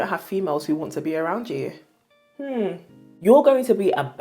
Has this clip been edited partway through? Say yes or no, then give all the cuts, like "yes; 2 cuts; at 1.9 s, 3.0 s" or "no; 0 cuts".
yes; 1 cut; at 3.1 s